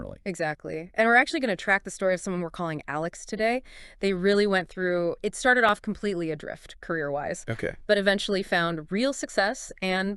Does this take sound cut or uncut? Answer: uncut